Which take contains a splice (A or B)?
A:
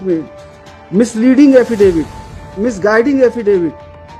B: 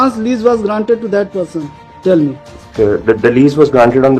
B